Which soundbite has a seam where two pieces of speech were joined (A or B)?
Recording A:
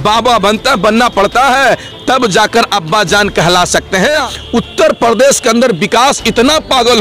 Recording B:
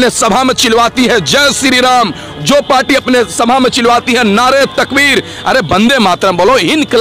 A